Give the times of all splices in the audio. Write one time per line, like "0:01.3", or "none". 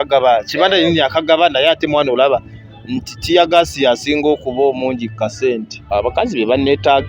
0:05.7